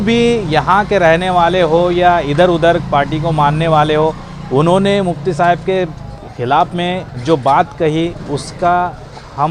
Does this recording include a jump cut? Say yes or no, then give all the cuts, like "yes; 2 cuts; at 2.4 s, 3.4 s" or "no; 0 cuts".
no; 0 cuts